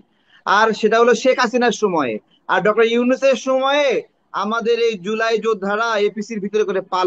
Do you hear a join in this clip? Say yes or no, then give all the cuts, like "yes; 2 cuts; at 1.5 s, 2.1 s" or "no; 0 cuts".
no; 0 cuts